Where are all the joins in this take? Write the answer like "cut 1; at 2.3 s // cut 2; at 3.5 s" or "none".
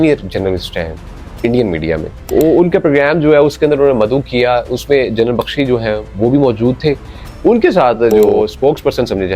cut 1; at 2.2 s // cut 2; at 8.3 s